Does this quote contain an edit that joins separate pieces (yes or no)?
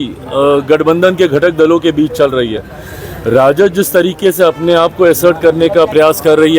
no